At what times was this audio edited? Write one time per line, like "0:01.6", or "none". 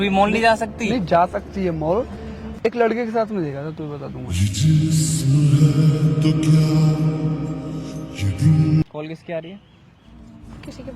0:08.8